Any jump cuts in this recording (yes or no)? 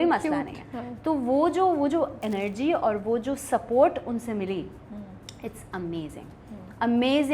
no